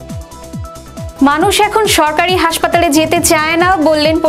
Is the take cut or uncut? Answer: cut